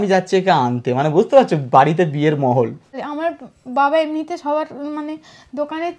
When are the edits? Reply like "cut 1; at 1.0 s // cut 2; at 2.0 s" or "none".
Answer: cut 1; at 3.0 s